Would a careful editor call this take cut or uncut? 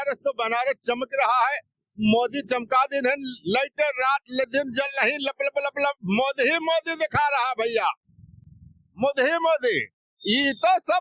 uncut